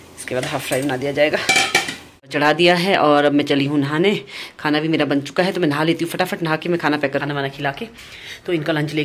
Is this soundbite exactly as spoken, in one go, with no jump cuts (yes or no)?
no